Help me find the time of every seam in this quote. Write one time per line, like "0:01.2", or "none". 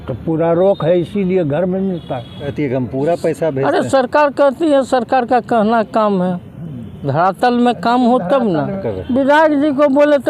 0:02.5
0:08.9